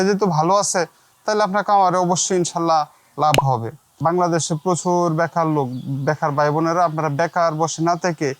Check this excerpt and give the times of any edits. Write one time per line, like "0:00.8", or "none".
0:03.8